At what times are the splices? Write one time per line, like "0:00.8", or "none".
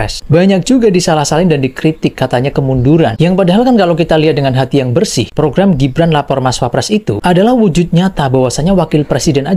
none